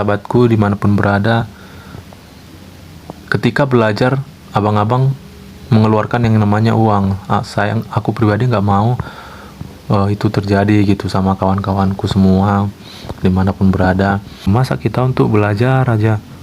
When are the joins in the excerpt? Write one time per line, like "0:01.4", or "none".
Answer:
0:14.4